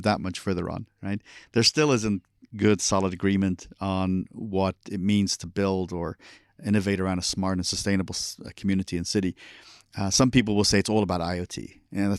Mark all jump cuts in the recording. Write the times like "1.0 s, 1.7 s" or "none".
none